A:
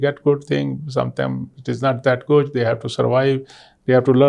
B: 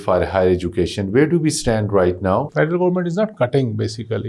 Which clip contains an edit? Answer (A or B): B